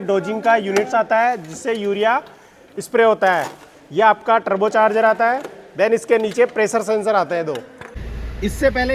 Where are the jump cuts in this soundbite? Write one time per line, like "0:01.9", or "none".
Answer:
0:07.9

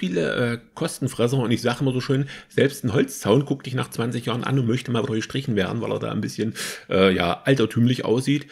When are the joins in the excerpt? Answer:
none

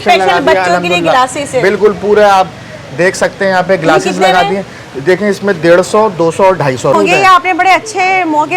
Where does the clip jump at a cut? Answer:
0:06.9

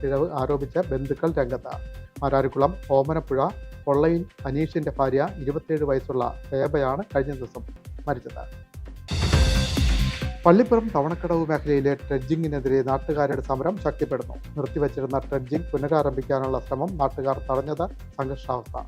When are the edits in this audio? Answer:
none

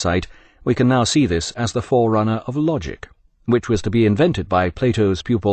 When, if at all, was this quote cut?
none

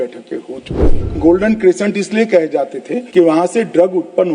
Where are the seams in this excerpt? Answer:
0:01.0
0:02.9

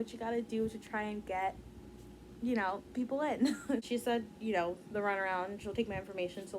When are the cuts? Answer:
0:03.9

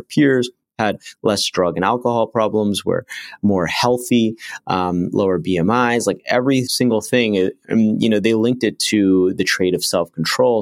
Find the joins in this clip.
0:06.7

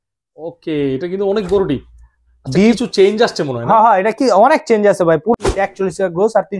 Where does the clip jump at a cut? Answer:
0:05.3

